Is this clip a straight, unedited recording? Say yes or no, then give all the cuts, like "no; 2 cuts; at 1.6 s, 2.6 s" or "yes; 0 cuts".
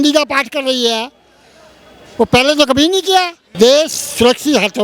no; 1 cut; at 3.4 s